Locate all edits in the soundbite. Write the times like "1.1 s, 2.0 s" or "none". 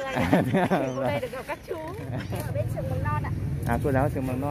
2.2 s

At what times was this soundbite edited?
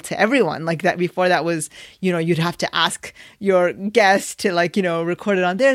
none

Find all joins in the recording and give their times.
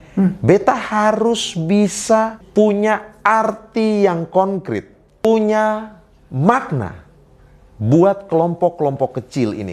2.4 s, 5.2 s

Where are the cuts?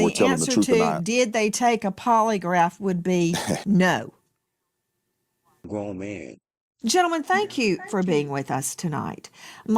5.6 s

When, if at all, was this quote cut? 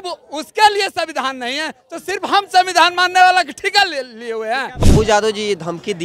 4.9 s

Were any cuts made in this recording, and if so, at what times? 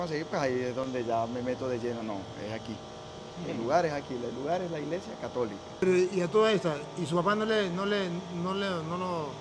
5.8 s

